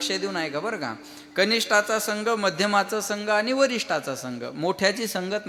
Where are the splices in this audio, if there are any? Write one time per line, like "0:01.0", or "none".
none